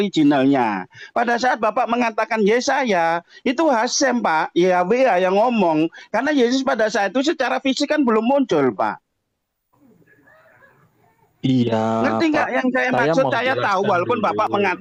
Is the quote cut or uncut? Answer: uncut